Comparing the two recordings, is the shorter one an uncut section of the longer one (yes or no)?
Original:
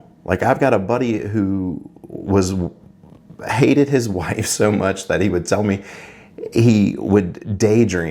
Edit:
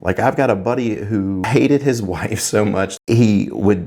no